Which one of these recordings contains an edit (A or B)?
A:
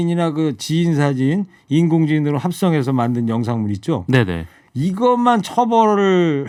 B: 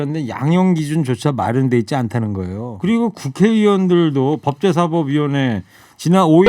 B